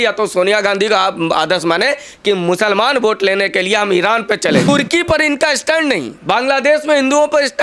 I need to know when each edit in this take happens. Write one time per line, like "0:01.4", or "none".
0:04.6